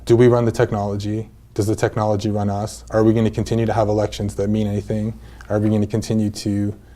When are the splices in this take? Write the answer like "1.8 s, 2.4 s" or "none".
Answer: 2.7 s